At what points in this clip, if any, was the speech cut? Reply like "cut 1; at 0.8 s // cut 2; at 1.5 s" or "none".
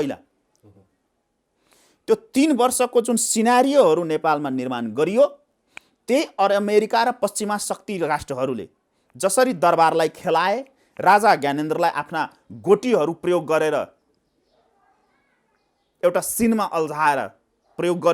none